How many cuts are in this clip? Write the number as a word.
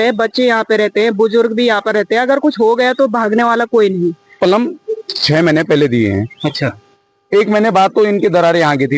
one